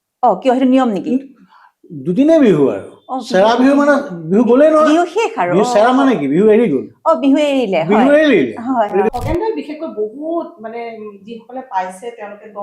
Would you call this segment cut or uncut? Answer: cut